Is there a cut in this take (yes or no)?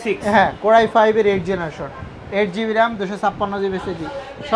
no